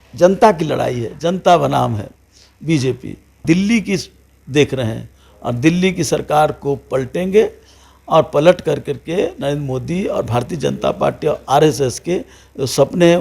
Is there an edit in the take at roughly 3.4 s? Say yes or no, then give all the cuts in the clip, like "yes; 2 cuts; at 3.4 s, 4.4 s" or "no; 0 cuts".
yes; 1 cut; at 3.4 s